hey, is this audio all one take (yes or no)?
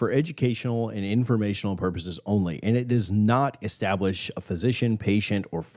yes